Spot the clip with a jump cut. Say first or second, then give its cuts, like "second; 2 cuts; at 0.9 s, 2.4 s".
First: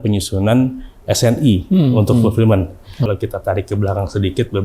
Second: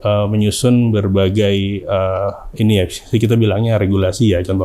first; 1 cut; at 3.1 s